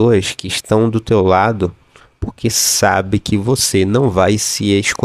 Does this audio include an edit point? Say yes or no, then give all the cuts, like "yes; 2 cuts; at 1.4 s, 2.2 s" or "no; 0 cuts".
no; 0 cuts